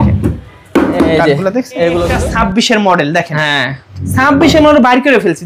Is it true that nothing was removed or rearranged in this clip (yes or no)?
no